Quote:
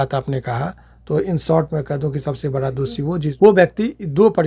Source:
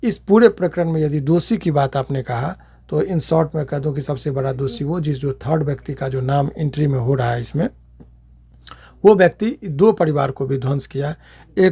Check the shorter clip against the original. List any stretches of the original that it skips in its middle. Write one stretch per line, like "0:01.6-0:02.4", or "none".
0:05.2-0:09.0